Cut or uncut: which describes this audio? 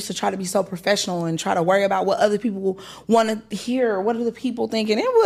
uncut